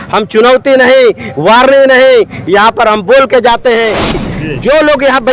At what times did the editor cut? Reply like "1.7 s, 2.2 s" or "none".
4.1 s